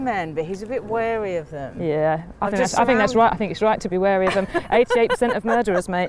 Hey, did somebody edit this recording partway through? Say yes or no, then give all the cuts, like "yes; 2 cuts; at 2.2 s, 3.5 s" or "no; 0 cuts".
no; 0 cuts